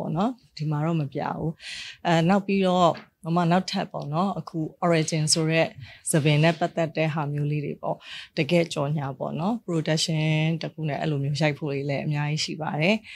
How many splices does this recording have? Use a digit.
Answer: 0